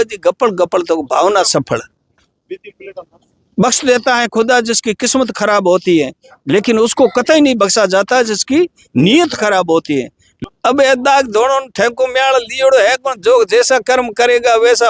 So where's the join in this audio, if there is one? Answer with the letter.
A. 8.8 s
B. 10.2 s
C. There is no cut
B